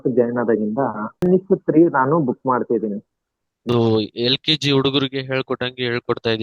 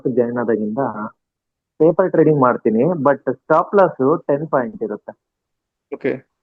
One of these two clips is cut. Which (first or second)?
first